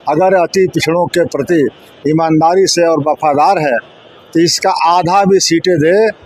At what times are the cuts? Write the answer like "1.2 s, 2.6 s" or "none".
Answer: none